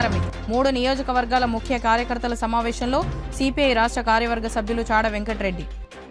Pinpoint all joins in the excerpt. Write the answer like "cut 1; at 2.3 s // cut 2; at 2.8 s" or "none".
none